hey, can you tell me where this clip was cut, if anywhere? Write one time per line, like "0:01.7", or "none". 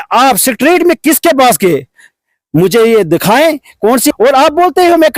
0:04.1